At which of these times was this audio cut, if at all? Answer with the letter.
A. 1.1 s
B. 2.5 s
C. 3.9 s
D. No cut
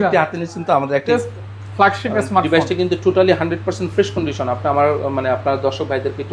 A